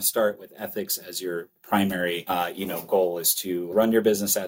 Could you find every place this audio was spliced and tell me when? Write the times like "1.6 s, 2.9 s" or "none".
1.6 s, 2.2 s, 3.7 s